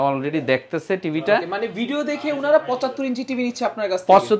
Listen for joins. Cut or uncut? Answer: uncut